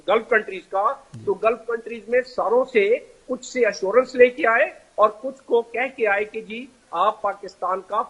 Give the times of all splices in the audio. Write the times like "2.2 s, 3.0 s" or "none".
none